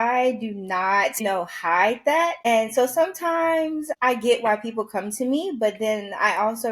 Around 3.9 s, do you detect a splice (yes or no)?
yes